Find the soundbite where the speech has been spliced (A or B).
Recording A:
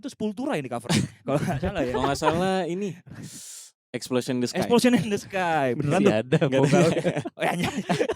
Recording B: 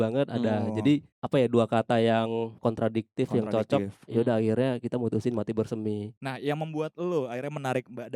B